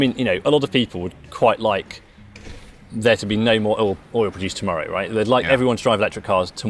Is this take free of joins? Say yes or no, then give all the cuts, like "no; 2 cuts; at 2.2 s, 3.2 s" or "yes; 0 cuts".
no; 1 cut; at 2.3 s